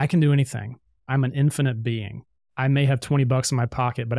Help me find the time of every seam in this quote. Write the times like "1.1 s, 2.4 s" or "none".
1.0 s